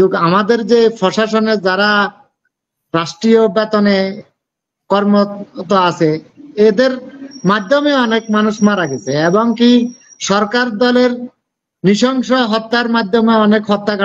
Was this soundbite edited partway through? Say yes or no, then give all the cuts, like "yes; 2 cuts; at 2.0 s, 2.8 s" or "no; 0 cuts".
no; 0 cuts